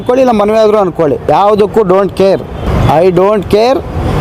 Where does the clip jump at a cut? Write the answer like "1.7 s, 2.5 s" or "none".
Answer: 1.3 s, 2.7 s